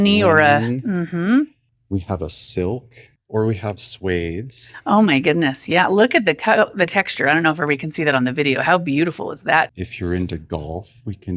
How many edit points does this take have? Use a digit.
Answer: 2